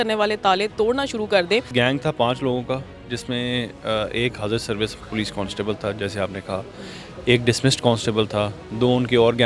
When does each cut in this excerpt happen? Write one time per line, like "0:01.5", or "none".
0:01.7